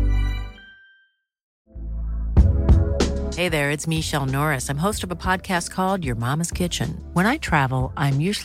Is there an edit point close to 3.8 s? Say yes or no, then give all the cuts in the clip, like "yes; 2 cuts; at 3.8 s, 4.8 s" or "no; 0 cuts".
no; 1 cut; at 1.6 s